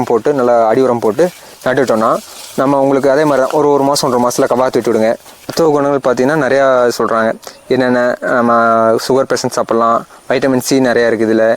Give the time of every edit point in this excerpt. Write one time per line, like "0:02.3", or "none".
0:05.6